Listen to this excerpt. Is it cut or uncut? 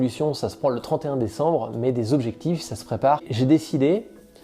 cut